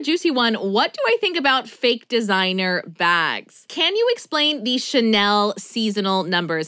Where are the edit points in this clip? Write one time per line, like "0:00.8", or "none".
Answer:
0:03.7